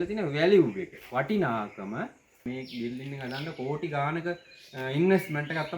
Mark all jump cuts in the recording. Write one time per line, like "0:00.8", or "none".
0:02.5

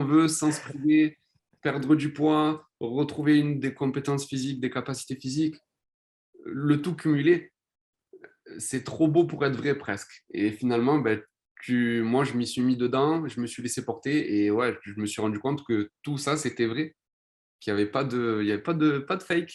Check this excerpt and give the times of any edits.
none

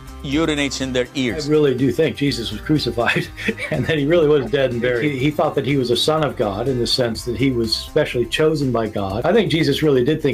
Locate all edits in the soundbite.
0:03.6

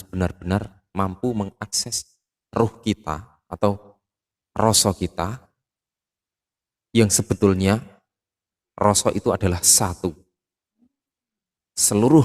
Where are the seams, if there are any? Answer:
none

